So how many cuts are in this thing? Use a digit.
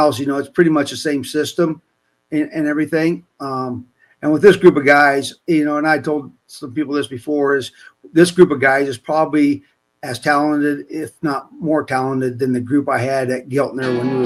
0